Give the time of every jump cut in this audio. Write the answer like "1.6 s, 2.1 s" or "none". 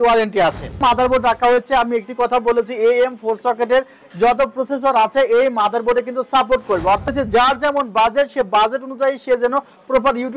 0.8 s, 7.1 s